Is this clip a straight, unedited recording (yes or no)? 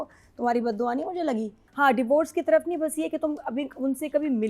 no